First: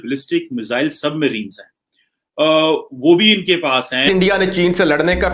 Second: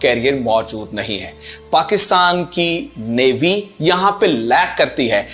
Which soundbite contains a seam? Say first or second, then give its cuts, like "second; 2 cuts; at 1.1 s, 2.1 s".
first; 1 cut; at 4.1 s